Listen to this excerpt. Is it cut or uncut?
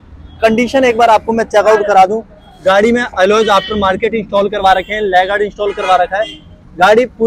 uncut